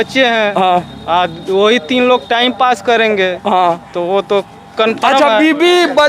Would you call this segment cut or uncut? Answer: uncut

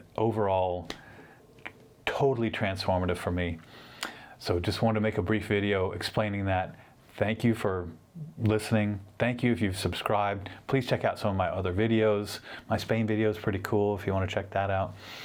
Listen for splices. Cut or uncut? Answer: uncut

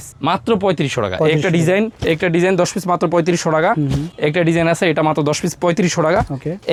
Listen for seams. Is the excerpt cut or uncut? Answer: uncut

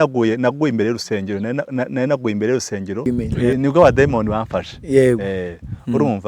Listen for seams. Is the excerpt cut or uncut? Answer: cut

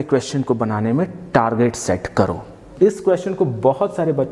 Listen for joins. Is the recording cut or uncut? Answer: cut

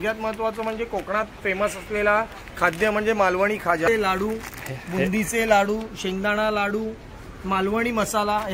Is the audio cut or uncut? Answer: cut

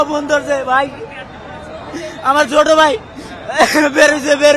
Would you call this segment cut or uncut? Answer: uncut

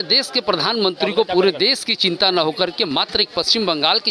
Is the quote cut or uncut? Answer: uncut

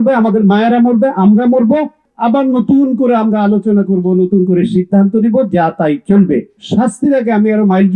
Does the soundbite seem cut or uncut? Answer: cut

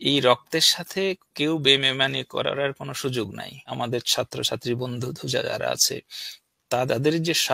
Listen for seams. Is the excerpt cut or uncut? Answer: cut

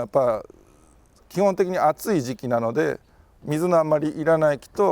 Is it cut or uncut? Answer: cut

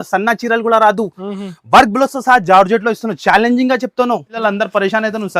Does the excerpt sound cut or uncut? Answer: cut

